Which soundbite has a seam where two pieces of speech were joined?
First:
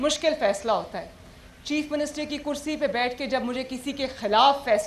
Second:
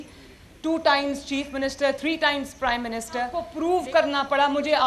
second; 1 cut; at 3.4 s

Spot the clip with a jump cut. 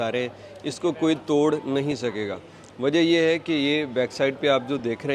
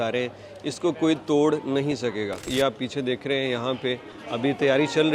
second; 1 cut; at 2.5 s

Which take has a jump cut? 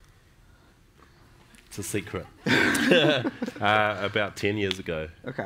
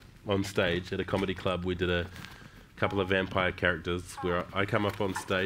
first; 1 cut; at 2.2 s

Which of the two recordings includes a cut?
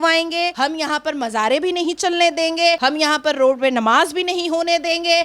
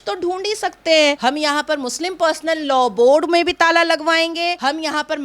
second; 1 cut; at 1.2 s

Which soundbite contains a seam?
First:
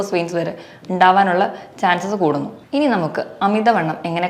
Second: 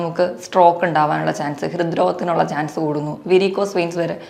first; 1 cut; at 2.6 s

